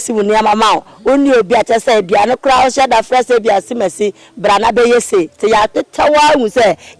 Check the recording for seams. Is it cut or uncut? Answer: uncut